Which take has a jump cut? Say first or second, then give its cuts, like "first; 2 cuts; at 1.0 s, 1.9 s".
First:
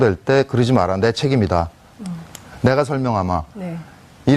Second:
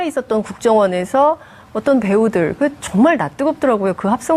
first; 1 cut; at 3.2 s